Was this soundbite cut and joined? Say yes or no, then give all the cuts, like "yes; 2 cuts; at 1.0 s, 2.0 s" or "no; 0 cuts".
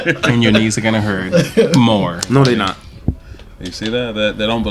no; 0 cuts